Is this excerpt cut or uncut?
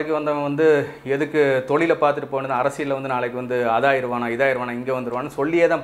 uncut